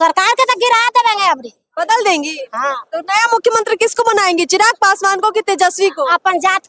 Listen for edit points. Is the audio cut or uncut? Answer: uncut